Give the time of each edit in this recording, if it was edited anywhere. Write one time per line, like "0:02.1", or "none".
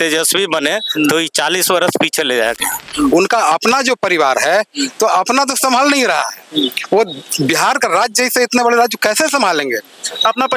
0:02.9

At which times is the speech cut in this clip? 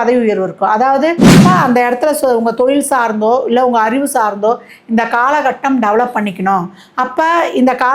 0:01.3

